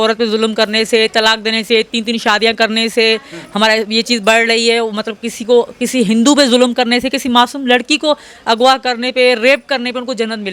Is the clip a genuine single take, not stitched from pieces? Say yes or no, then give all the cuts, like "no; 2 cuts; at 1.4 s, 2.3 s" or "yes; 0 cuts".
yes; 0 cuts